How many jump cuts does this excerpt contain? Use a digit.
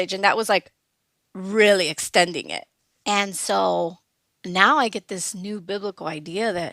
1